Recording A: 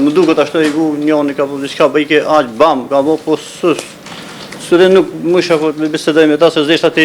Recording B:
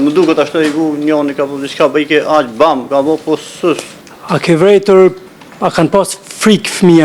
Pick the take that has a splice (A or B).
B